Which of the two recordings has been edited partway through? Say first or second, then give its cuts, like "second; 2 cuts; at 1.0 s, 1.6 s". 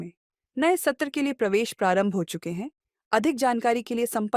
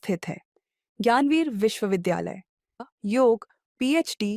second; 1 cut; at 2.8 s